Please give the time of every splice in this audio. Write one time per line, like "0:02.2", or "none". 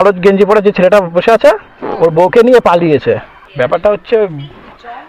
0:03.4